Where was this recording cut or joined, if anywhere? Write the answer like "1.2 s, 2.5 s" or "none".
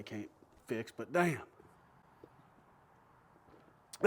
1.6 s